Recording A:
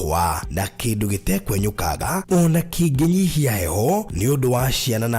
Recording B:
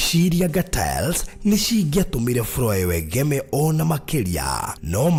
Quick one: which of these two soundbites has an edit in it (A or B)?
A